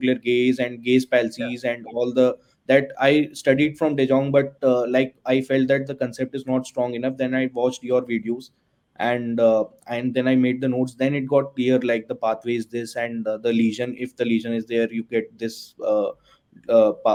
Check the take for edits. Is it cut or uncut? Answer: uncut